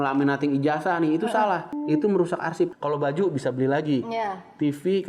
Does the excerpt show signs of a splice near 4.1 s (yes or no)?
no